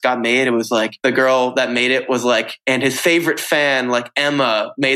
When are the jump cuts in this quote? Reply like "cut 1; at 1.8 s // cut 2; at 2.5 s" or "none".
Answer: cut 1; at 0.9 s // cut 2; at 2.5 s